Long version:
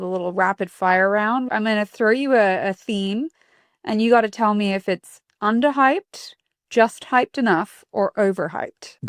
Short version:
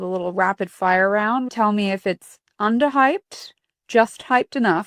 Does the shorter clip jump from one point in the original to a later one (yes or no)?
yes